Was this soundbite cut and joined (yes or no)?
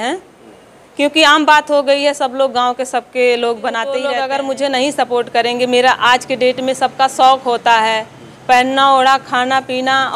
yes